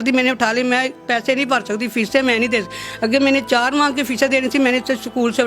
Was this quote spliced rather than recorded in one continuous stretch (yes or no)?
no